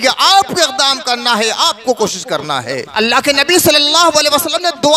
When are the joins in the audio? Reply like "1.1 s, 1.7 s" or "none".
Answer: 2.9 s

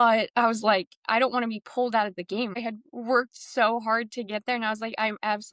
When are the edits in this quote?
2.6 s

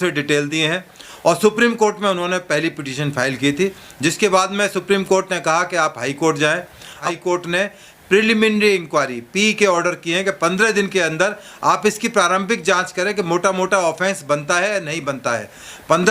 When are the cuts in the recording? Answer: 7.0 s

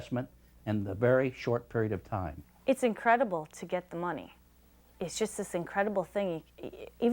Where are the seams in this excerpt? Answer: 2.4 s

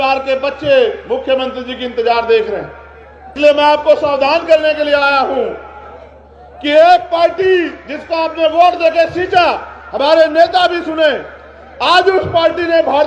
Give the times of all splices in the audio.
3.3 s

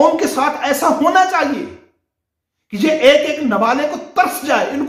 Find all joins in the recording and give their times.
none

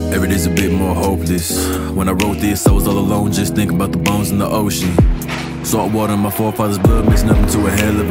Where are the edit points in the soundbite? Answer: 1.7 s

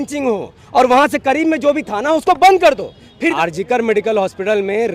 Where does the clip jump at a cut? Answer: 3.3 s

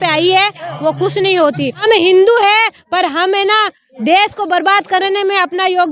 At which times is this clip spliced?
1.8 s

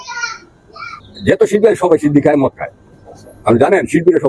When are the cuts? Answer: 1.1 s

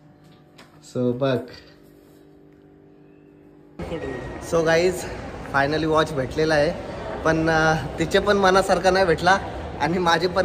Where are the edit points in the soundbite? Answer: 3.8 s

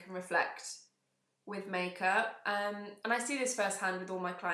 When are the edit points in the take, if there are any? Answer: none

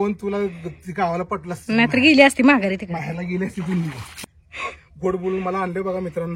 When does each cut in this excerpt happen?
4.1 s

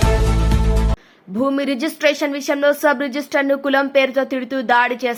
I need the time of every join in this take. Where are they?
none

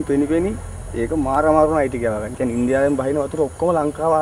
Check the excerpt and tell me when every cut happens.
2.3 s

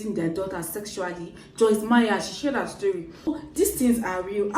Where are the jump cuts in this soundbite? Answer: 3.3 s

